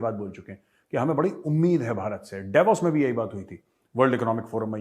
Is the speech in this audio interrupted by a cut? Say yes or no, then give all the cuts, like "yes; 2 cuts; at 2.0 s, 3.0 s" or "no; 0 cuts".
no; 0 cuts